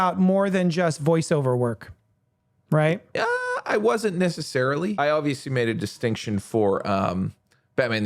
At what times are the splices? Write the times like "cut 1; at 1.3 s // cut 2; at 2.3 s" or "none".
cut 1; at 4.9 s